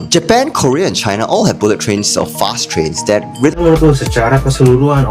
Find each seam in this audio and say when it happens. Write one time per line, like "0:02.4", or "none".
0:03.5